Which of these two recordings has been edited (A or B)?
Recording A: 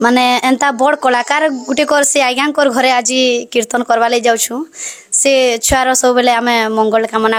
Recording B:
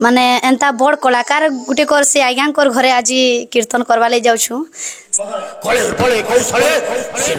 B